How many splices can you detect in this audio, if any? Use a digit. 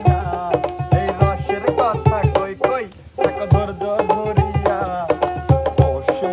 0